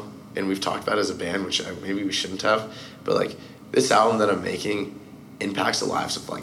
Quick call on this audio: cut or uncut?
uncut